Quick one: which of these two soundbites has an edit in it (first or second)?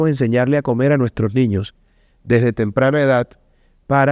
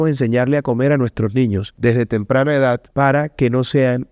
second